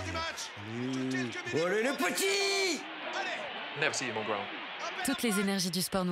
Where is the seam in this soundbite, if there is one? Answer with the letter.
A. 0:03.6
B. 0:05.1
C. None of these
B